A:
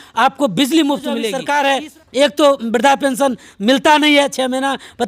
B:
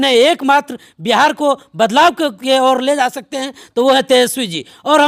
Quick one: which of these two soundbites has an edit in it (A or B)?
A